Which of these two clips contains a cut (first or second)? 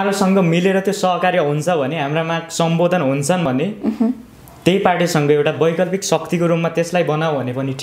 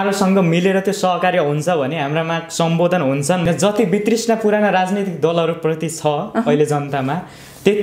second